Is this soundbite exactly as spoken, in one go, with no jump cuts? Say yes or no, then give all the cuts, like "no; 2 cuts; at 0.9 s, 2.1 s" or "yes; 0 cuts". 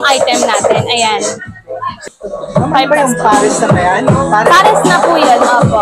no; 1 cut; at 2.0 s